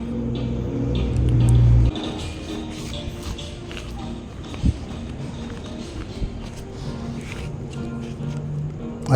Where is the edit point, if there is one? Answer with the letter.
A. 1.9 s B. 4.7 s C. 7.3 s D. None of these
A